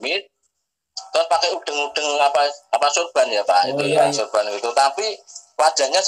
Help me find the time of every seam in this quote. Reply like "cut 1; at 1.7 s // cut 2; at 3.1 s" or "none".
cut 1; at 4.1 s